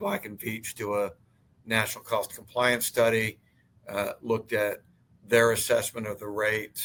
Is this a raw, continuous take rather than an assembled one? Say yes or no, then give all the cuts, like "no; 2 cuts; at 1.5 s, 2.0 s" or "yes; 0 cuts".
yes; 0 cuts